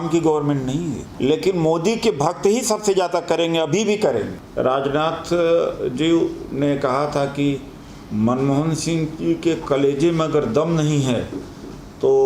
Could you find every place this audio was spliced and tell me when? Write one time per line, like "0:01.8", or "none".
0:01.0
0:04.4